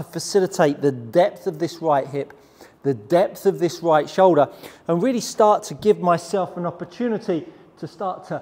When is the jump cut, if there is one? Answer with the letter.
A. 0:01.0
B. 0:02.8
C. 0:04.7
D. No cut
D